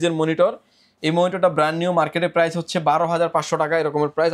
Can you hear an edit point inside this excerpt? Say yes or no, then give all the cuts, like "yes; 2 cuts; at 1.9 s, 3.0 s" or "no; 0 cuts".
no; 0 cuts